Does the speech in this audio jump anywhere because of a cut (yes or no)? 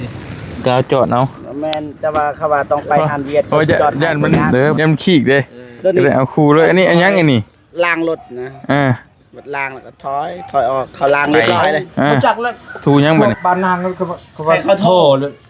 yes